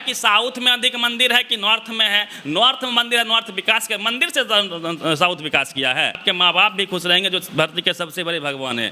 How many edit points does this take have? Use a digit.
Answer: 1